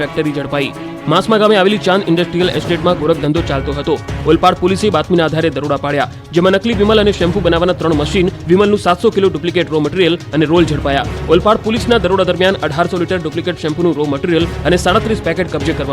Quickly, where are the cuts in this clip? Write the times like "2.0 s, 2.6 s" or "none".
10.6 s

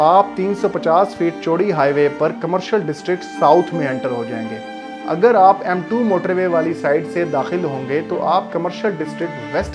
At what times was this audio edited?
none

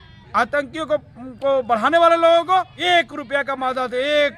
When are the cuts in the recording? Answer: 2.7 s

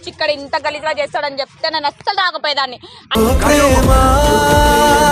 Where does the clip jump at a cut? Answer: 3.0 s

